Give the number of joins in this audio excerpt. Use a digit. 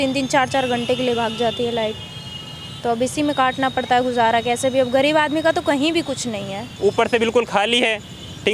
1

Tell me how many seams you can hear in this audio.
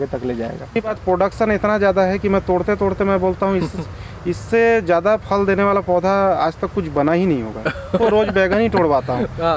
2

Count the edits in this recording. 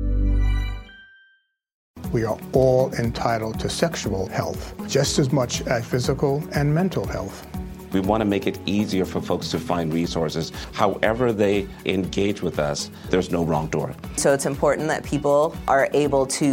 1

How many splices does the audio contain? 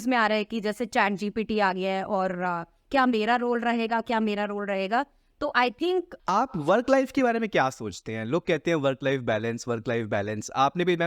1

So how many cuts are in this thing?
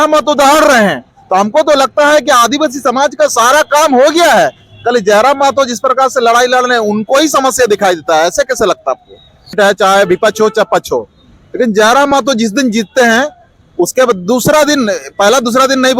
1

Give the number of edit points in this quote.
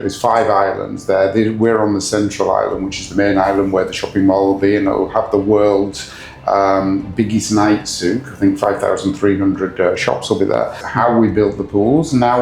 1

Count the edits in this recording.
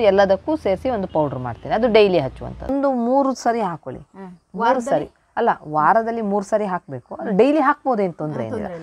1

